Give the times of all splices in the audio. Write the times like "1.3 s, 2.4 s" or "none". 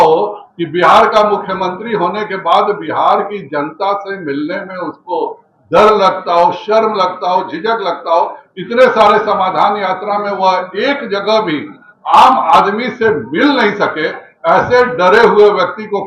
none